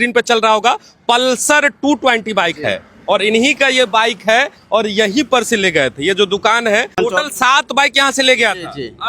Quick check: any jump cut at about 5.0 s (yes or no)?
no